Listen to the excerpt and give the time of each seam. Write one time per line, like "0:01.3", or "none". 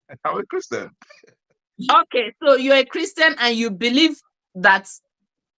none